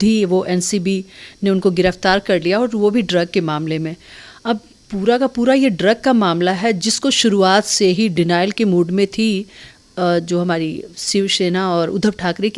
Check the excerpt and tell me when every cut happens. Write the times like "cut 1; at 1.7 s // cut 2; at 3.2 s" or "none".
none